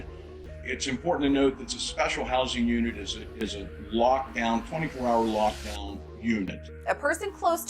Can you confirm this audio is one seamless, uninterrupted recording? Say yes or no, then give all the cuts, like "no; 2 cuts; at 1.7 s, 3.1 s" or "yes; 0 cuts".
no; 1 cut; at 6.7 s